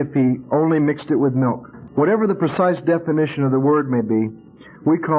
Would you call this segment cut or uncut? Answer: cut